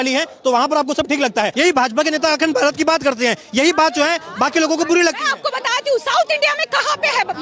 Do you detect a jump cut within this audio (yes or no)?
yes